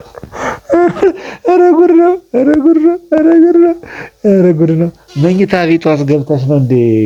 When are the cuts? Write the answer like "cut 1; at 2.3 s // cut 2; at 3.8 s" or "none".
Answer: none